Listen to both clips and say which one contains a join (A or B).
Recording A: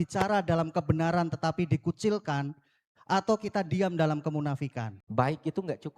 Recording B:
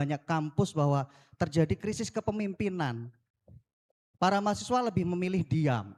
A